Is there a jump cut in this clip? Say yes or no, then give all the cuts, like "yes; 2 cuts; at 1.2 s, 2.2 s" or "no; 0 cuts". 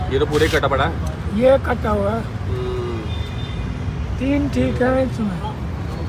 no; 0 cuts